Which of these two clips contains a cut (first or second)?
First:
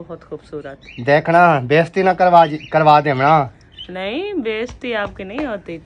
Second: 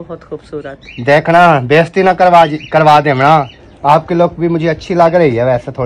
second